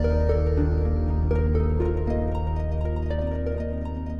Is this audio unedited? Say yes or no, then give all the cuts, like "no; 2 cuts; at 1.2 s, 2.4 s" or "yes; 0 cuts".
yes; 0 cuts